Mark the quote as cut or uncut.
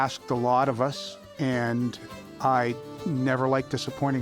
uncut